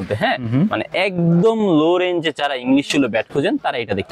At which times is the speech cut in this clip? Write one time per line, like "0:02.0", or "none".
none